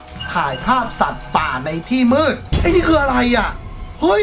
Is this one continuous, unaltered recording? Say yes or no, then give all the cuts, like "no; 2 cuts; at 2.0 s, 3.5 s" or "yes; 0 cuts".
no; 1 cut; at 2.4 s